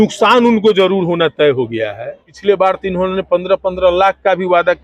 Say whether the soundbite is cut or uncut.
cut